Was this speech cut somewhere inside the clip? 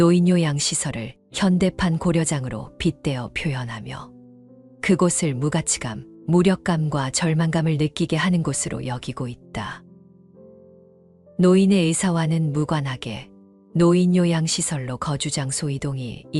no; 0 cuts

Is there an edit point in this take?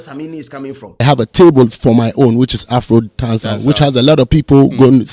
yes; 1 cut; at 1.0 s

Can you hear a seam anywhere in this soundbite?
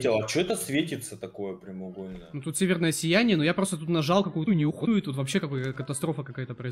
no; 0 cuts

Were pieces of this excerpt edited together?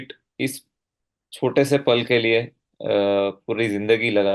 no; 0 cuts

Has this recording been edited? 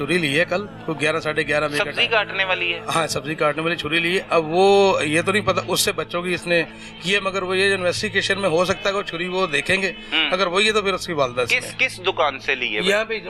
no; 0 cuts

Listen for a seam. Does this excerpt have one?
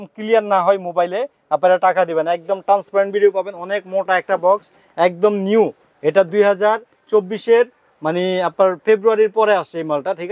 no; 0 cuts

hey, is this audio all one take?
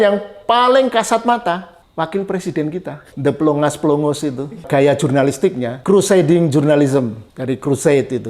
no; 5 cuts; at 1.8 s, 3.0 s, 4.7 s, 5.7 s, 7.3 s

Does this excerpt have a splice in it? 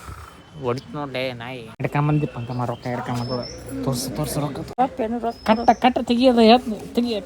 yes; 2 cuts; at 1.8 s, 4.7 s

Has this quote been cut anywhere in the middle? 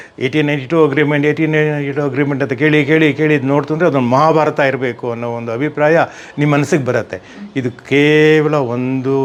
no; 0 cuts

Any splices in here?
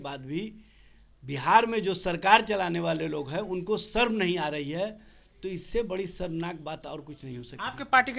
no; 0 cuts

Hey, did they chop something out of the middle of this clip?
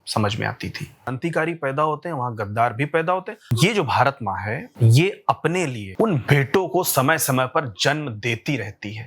yes; 4 cuts; at 1.2 s, 3.4 s, 4.7 s, 5.8 s

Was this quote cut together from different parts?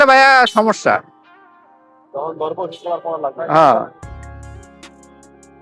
yes; 1 cut; at 4.0 s

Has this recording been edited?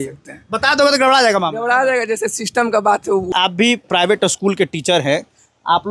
yes; 1 cut; at 3.3 s

